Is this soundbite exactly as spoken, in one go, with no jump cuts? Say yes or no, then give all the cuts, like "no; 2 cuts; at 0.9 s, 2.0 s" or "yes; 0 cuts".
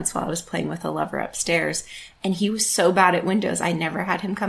yes; 0 cuts